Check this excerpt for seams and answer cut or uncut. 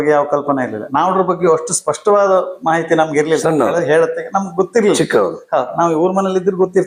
uncut